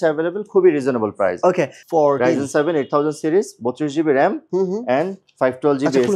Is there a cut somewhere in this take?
yes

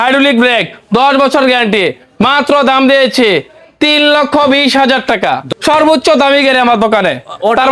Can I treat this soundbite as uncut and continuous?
yes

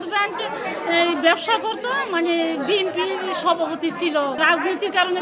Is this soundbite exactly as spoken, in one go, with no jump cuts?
yes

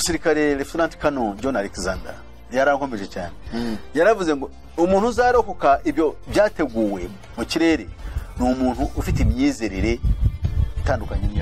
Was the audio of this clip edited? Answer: no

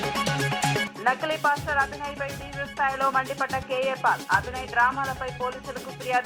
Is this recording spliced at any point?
no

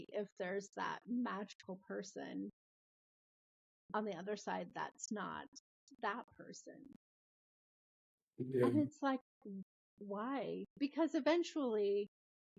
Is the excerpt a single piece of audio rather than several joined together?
yes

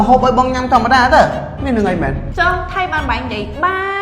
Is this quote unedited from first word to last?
no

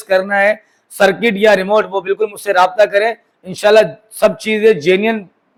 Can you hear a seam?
no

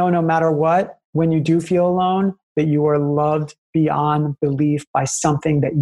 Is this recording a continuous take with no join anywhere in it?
no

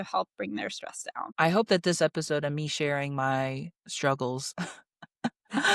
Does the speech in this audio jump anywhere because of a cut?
yes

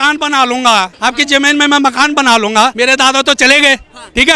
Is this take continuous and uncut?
no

